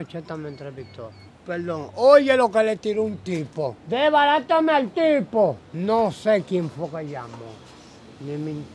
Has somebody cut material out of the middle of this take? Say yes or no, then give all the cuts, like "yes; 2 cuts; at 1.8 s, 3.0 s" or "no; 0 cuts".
yes; 3 cuts; at 1.3 s, 3.8 s, 5.7 s